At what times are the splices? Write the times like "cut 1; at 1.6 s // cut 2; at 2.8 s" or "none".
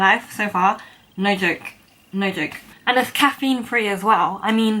cut 1; at 2.7 s

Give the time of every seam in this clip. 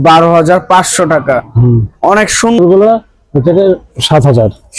cut 1; at 2.6 s

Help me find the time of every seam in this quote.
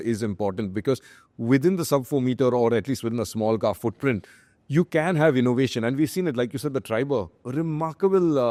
none

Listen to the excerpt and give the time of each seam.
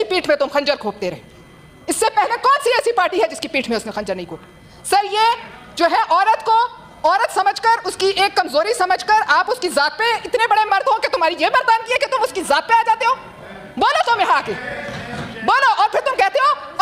none

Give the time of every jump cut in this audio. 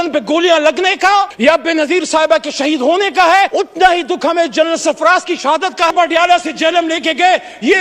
cut 1; at 1.3 s // cut 2; at 3.5 s // cut 3; at 5.9 s

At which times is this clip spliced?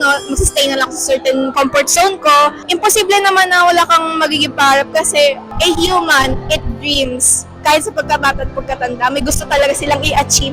cut 1; at 1.5 s // cut 2; at 2.6 s // cut 3; at 5.5 s

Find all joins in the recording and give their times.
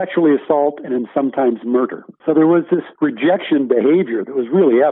cut 1; at 2.1 s // cut 2; at 2.9 s

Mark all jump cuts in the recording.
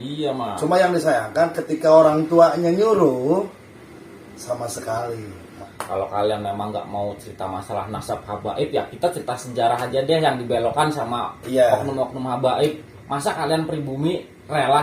cut 1; at 5.6 s

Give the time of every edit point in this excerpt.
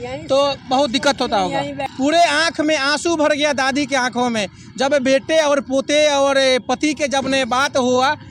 cut 1; at 1.8 s

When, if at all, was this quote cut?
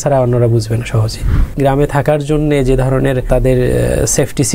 cut 1; at 1.5 s // cut 2; at 3.3 s

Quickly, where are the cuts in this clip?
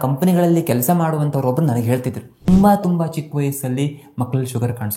cut 1; at 2.5 s

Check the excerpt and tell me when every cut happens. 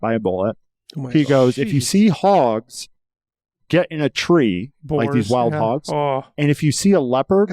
cut 1; at 6.3 s

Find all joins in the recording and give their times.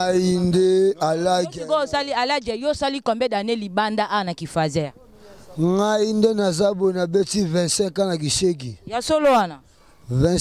none

